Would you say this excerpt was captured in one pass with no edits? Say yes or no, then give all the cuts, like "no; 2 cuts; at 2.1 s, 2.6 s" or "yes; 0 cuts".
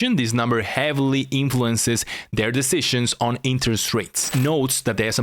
no; 1 cut; at 4.3 s